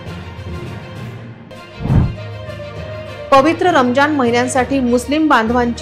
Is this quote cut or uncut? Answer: cut